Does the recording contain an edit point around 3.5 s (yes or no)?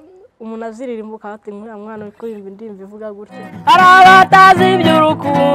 yes